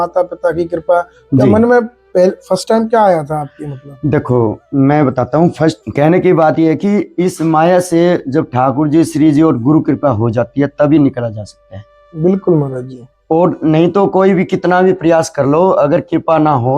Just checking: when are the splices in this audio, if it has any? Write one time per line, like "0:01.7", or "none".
0:05.8